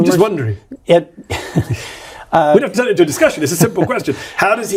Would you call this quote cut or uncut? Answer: uncut